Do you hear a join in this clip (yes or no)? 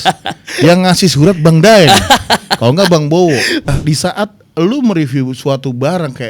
yes